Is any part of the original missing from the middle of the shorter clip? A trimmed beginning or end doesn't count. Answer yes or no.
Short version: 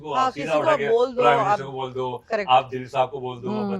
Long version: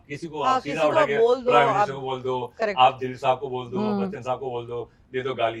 no